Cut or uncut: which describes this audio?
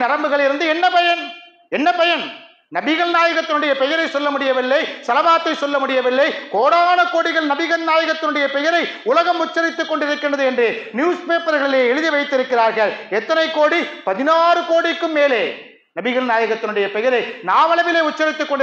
uncut